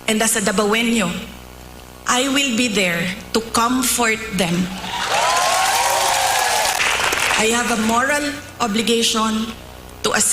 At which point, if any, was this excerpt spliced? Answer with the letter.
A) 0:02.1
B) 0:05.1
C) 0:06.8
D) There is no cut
C